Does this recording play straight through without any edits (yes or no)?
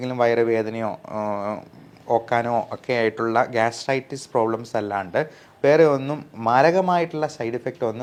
yes